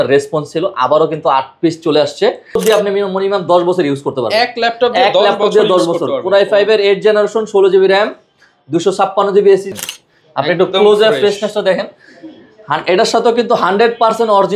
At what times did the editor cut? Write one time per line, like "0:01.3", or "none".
0:02.6
0:09.7